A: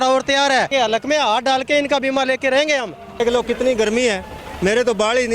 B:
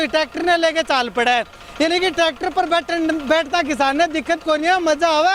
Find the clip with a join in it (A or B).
A